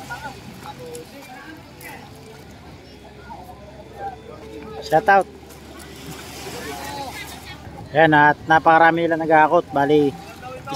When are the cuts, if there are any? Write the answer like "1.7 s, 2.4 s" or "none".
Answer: 2.4 s, 4.4 s, 7.7 s